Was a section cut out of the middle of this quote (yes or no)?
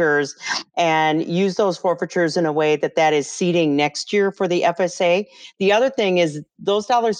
yes